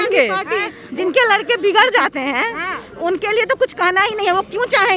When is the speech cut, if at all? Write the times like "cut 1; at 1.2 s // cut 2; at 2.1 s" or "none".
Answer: none